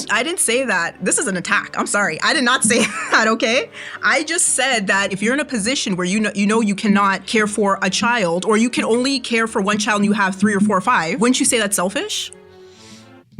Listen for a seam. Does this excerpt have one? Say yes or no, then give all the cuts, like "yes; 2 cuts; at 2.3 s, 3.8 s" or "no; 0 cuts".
yes; 3 cuts; at 5.2 s, 7.2 s, 11.2 s